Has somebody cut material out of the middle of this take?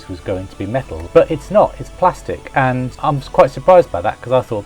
yes; 2 cuts; at 1.0 s, 2.9 s

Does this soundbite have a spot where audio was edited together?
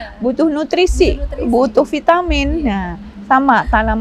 no; 0 cuts

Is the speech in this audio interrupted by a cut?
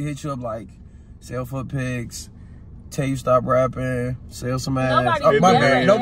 no; 0 cuts

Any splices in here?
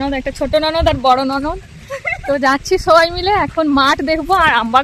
no; 0 cuts

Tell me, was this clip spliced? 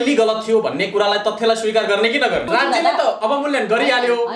yes; 1 cut; at 2.5 s

